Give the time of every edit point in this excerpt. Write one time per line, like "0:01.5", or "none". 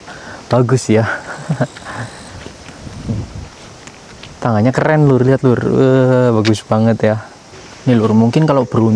none